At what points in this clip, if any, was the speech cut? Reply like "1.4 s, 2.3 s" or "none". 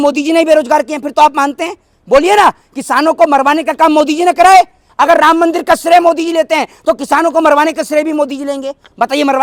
none